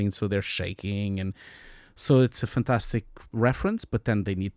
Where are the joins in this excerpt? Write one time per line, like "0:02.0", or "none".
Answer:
0:03.3